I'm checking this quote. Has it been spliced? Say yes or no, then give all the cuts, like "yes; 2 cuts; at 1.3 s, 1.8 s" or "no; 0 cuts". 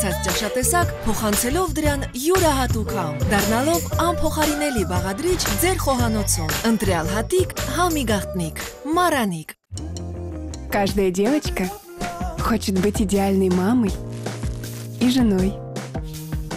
no; 0 cuts